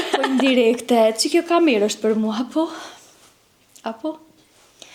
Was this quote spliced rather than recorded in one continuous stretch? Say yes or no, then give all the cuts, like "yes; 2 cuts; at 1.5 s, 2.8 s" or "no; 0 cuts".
no; 0 cuts